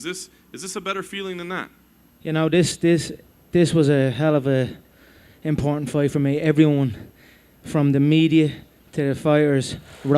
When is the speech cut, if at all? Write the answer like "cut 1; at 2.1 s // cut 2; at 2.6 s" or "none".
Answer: cut 1; at 3.7 s

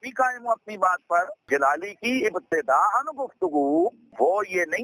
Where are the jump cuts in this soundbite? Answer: none

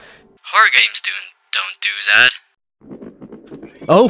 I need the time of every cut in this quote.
cut 1; at 2.6 s

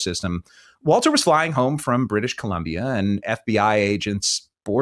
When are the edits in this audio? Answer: none

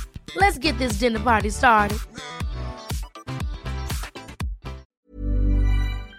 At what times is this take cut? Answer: cut 1; at 4.8 s

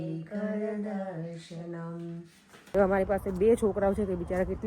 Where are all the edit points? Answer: cut 1; at 2.5 s

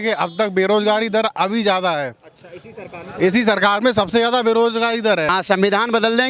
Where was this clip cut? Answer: cut 1; at 5.3 s

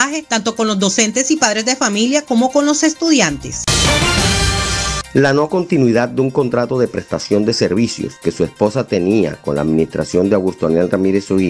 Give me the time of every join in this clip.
none

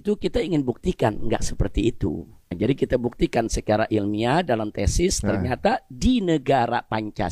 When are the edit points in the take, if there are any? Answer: cut 1; at 2.4 s

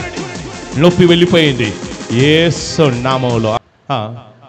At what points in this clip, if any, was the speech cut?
cut 1; at 3.6 s

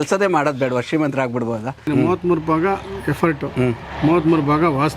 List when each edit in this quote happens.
cut 1; at 1.9 s

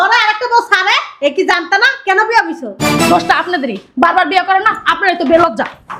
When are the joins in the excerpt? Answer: none

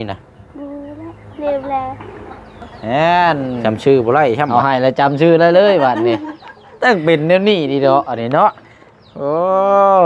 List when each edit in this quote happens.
cut 1; at 2.7 s // cut 2; at 3.6 s // cut 3; at 4.5 s

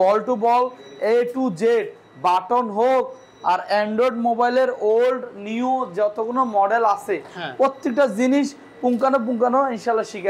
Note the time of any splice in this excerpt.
none

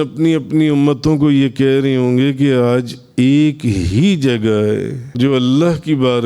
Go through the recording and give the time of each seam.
cut 1; at 5.0 s

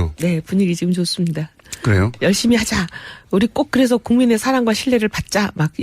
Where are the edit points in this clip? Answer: cut 1; at 2.1 s

